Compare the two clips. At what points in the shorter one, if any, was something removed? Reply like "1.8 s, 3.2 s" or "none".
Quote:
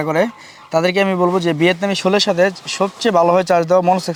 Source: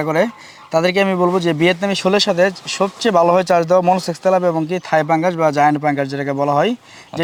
none